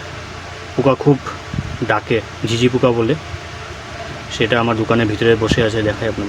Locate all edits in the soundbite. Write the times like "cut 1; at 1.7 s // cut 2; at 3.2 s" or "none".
none